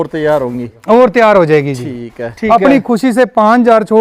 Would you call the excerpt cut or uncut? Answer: cut